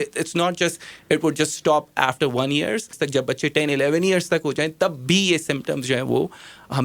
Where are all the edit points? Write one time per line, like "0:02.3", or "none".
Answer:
0:02.9